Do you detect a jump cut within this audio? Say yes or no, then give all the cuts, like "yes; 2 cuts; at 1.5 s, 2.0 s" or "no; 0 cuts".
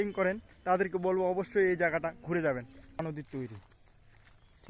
yes; 1 cut; at 3.0 s